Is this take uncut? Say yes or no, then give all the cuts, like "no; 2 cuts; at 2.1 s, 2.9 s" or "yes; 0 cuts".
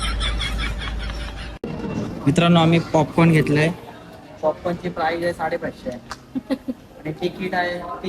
no; 1 cut; at 1.6 s